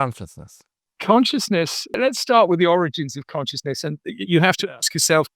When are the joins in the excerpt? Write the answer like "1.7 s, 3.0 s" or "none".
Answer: 0.9 s, 1.9 s